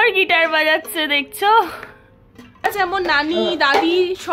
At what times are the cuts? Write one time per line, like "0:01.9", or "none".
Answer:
0:02.6